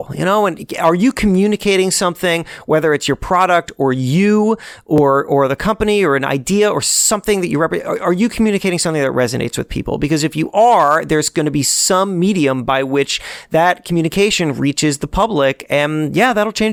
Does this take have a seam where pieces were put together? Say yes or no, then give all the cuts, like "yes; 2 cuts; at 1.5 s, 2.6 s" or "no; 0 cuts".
no; 0 cuts